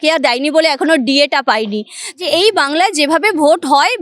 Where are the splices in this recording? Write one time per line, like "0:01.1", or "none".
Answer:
0:02.0